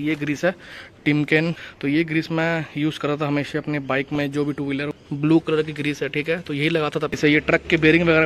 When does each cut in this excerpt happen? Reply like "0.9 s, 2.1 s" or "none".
1.7 s, 4.9 s, 7.2 s